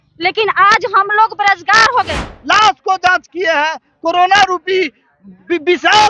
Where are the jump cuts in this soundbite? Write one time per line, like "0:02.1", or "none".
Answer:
0:02.3